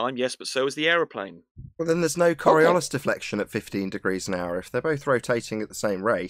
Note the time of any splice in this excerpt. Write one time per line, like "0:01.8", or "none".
none